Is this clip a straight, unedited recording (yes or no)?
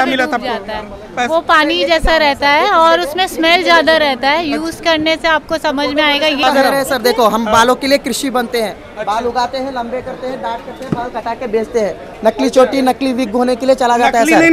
no